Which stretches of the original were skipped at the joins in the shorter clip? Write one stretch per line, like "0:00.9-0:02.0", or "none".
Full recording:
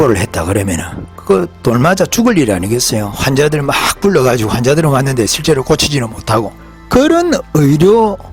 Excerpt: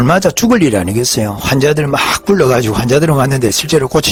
none